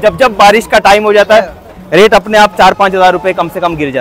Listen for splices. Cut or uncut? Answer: uncut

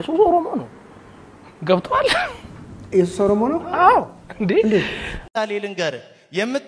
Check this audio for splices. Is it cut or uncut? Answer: cut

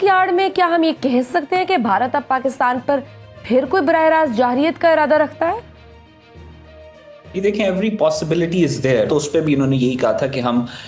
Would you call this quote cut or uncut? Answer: uncut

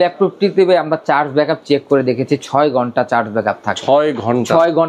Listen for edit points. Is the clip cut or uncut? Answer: uncut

